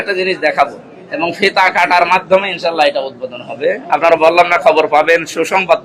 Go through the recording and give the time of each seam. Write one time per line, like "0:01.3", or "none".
none